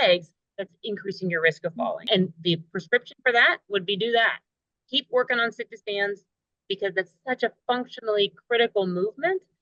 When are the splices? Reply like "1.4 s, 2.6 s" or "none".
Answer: 2.1 s